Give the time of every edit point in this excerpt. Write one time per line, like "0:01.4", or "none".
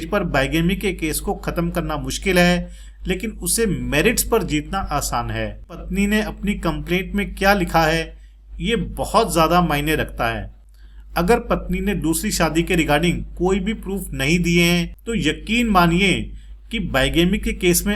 0:05.8
0:15.0